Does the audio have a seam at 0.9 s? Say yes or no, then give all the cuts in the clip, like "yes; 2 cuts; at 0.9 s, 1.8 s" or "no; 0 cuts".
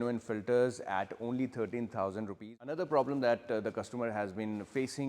no; 1 cut; at 2.6 s